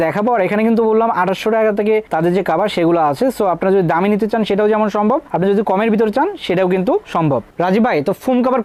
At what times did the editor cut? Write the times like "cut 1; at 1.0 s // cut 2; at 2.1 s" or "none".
none